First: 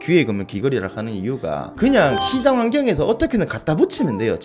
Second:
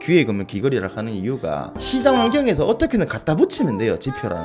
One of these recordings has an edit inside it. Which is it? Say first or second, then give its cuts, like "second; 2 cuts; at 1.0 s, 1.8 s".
second; 1 cut; at 1.8 s